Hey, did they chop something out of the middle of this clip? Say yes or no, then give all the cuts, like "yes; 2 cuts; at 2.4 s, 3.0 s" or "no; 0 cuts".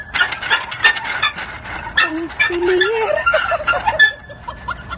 no; 0 cuts